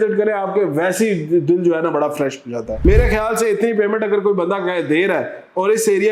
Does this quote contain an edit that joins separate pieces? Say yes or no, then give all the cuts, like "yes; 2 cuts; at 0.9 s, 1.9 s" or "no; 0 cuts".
yes; 1 cut; at 2.8 s